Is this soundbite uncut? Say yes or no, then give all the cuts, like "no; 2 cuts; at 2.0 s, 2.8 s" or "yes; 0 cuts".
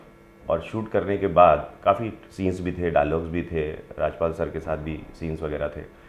yes; 0 cuts